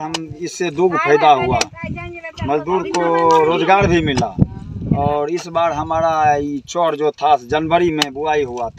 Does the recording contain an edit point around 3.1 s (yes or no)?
no